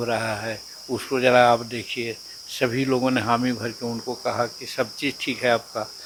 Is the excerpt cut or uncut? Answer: uncut